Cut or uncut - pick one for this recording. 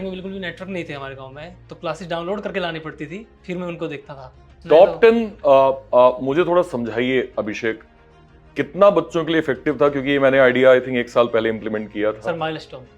cut